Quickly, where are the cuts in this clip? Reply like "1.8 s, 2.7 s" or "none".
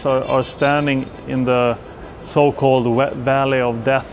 none